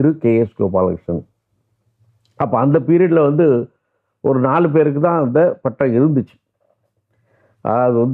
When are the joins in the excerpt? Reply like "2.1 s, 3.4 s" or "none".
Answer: none